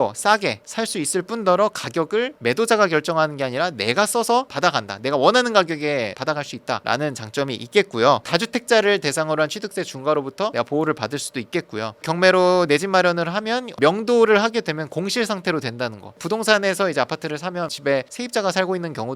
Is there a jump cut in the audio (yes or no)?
no